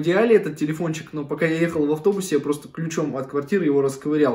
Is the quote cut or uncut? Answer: uncut